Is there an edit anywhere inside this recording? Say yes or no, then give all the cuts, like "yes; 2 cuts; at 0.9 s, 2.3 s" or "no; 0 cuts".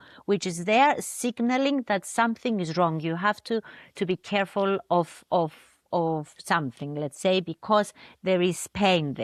no; 0 cuts